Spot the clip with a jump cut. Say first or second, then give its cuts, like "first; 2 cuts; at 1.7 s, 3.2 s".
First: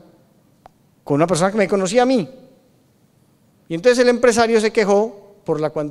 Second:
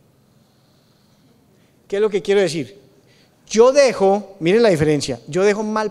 first; 1 cut; at 2.4 s